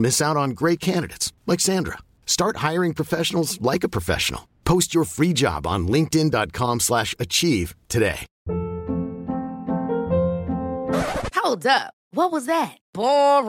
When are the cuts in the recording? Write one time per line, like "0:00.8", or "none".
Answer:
0:08.3